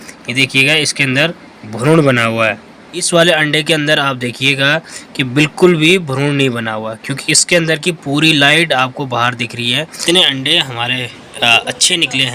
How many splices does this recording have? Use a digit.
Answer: 2